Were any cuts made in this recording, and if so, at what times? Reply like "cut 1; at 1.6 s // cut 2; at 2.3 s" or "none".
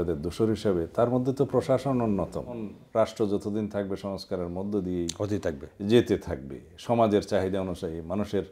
cut 1; at 2.8 s